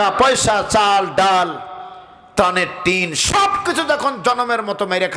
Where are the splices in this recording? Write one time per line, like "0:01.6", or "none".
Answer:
none